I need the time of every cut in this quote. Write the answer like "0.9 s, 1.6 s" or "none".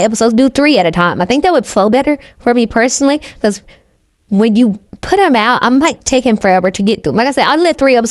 none